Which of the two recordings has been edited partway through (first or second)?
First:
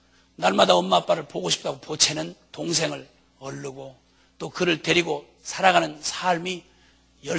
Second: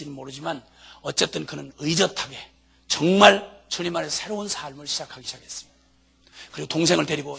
first